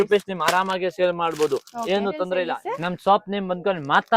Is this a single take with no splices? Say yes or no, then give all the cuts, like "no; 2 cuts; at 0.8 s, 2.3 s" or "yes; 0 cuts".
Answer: no; 1 cut; at 2.5 s